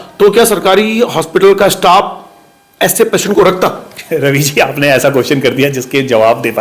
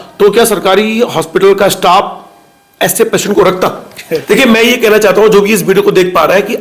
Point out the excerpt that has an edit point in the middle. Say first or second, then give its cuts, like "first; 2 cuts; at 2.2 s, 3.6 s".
second; 1 cut; at 4.2 s